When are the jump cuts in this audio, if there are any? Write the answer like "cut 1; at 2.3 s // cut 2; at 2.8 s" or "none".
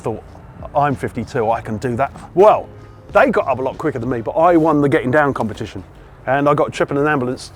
cut 1; at 2.2 s